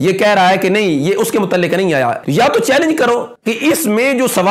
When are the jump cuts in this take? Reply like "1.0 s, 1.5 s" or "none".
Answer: 2.2 s, 3.4 s

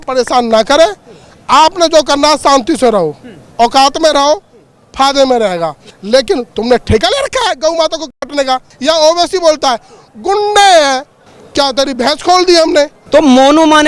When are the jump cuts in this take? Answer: 5.9 s, 8.7 s, 13.0 s

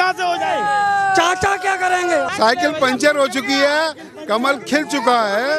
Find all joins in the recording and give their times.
2.3 s

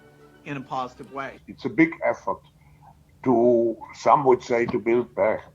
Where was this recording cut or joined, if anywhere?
1.4 s

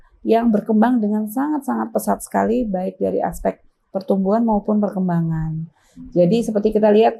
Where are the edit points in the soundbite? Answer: none

